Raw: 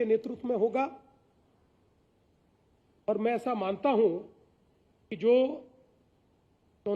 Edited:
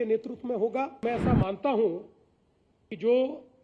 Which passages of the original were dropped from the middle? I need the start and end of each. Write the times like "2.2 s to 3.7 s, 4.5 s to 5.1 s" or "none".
1.0 s to 3.2 s